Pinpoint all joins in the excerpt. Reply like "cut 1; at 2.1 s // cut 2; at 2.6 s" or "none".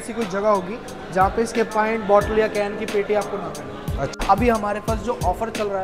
cut 1; at 4.2 s